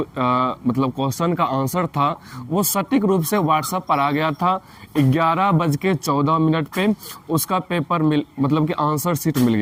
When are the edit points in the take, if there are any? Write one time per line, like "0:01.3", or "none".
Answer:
none